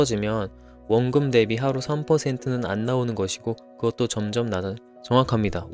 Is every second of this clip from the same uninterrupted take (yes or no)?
yes